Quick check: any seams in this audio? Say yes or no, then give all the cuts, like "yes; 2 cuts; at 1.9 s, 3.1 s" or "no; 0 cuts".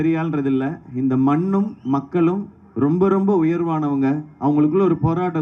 no; 0 cuts